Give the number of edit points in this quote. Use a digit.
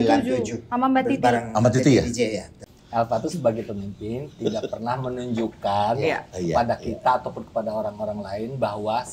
1